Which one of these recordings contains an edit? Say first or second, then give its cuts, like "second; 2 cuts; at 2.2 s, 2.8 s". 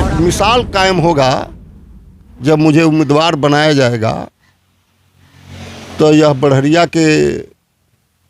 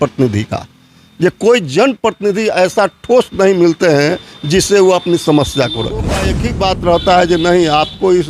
second; 1 cut; at 6.4 s